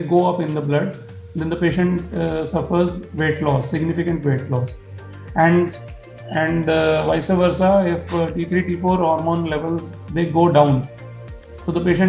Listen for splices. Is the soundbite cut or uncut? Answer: uncut